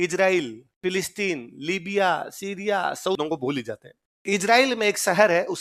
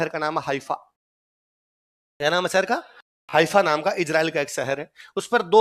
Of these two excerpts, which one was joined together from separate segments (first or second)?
first